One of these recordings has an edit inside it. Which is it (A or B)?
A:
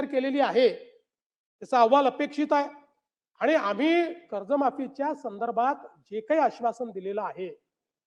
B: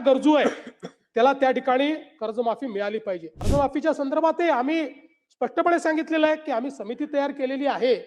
B